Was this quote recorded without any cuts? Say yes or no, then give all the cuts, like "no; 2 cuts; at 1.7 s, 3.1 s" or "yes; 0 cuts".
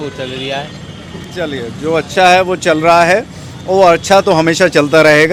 yes; 0 cuts